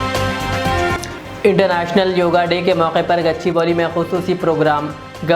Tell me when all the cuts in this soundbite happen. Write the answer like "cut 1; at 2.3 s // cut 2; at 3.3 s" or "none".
cut 1; at 1.1 s